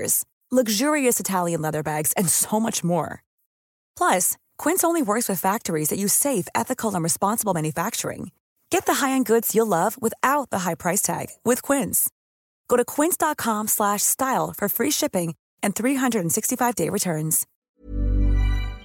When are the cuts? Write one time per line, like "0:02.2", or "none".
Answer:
0:17.5